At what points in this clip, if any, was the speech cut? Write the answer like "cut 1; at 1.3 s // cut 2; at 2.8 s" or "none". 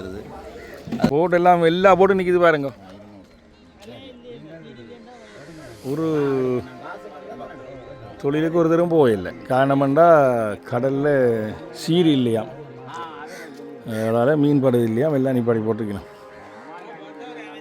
cut 1; at 1.1 s